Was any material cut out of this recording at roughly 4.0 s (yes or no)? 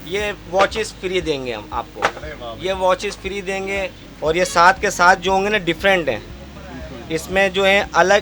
yes